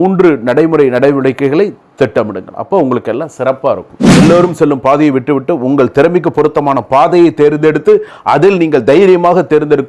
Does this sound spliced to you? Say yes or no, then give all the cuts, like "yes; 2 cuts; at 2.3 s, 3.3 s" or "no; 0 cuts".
yes; 1 cut; at 4.2 s